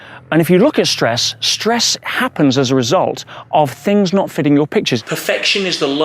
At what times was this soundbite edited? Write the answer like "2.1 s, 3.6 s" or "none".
5.0 s